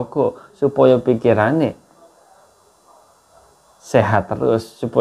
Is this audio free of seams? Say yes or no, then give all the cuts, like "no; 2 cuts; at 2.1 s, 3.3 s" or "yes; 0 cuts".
yes; 0 cuts